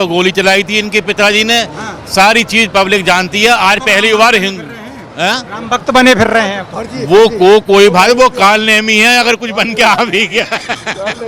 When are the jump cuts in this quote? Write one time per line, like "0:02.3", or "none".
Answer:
none